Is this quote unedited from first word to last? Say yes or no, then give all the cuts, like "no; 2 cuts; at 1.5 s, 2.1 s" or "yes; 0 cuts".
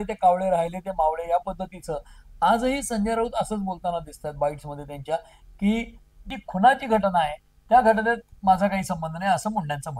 no; 1 cut; at 6.3 s